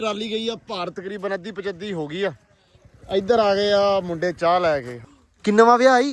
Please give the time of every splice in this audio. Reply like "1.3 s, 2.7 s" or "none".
5.0 s